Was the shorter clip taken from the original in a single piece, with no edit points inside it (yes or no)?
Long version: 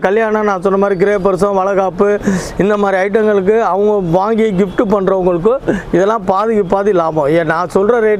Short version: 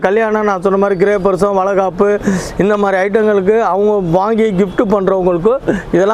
yes